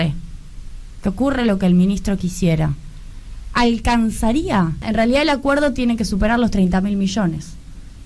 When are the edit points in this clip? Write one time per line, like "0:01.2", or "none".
0:04.8

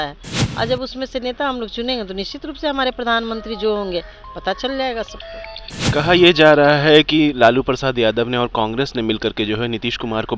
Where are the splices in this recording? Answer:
none

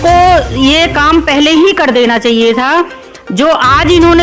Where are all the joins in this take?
none

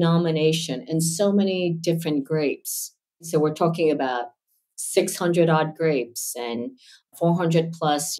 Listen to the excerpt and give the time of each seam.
0:03.3
0:07.1

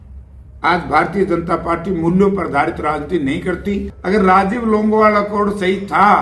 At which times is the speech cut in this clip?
0:03.9

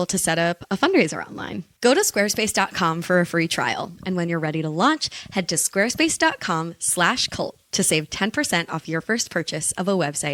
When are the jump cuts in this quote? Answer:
none

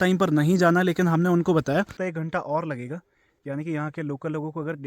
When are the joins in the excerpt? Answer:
0:01.9

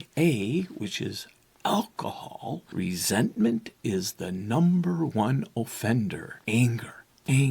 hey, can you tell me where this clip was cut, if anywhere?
0:02.6
0:06.3

